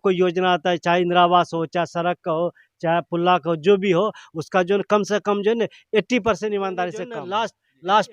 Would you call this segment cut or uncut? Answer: cut